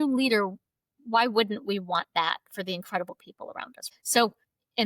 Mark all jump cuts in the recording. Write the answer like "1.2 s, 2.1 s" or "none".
3.8 s

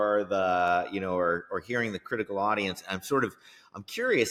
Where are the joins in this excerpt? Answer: none

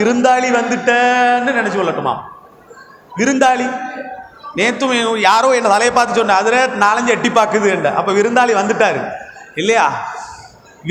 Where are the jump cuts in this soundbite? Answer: none

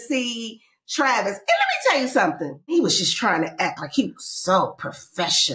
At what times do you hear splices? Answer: 2.7 s

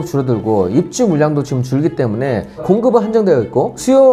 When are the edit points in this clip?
none

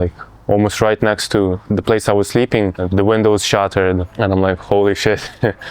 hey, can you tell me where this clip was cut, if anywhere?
2.8 s, 4.1 s

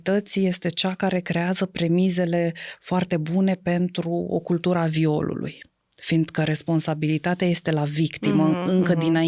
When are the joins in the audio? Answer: none

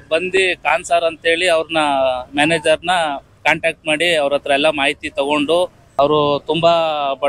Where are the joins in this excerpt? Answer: 5.8 s

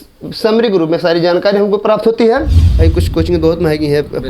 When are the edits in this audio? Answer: 2.6 s

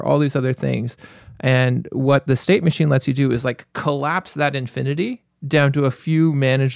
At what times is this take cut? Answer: none

